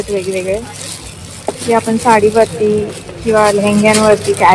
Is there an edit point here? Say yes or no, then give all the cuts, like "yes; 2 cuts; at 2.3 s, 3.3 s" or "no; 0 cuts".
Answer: no; 0 cuts